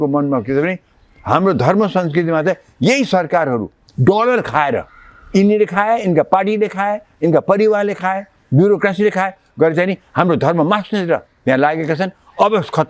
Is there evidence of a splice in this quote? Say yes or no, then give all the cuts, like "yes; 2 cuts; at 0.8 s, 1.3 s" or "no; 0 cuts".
no; 0 cuts